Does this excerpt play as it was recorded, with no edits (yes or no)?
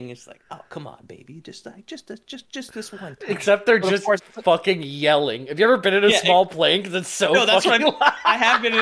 yes